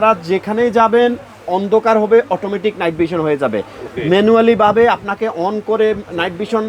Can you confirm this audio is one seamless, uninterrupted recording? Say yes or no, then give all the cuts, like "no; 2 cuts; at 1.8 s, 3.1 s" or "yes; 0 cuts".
yes; 0 cuts